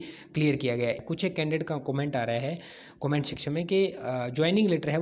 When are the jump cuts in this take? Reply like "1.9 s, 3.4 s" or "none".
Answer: 1.0 s